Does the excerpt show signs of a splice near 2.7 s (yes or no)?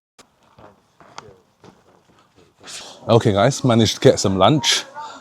yes